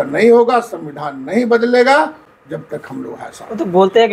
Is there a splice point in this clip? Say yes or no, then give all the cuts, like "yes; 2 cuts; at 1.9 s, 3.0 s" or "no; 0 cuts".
no; 0 cuts